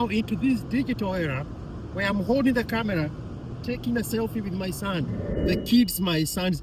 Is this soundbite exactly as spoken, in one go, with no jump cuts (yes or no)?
no